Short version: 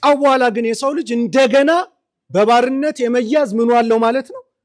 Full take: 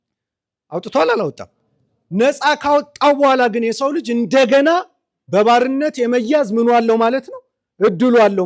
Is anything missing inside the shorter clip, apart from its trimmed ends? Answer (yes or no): no